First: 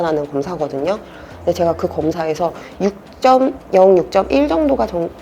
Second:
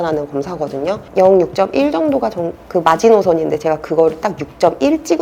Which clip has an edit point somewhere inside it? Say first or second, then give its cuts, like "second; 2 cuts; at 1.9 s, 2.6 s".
second; 1 cut; at 1.1 s